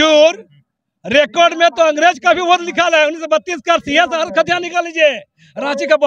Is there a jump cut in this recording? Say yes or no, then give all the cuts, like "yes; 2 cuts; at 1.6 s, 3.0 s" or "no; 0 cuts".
no; 0 cuts